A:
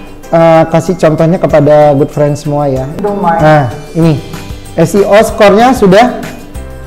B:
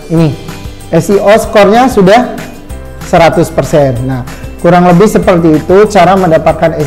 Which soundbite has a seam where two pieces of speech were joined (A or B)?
A